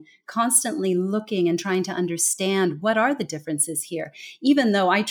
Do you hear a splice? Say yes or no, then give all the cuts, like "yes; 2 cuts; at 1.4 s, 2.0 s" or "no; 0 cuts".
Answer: no; 0 cuts